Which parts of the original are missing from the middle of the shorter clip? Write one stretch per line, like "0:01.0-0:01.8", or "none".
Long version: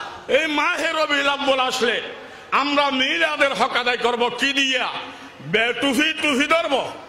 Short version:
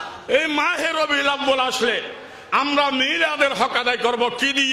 none